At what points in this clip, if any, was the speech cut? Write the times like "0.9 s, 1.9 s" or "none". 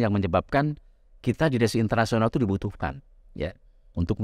none